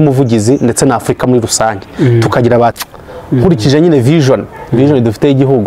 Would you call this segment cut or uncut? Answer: cut